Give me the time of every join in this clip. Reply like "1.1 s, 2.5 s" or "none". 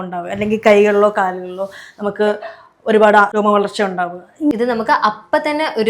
3.3 s, 4.5 s